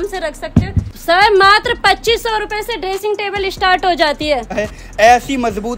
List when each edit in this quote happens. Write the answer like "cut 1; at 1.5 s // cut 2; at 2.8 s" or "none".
cut 1; at 1.0 s // cut 2; at 4.6 s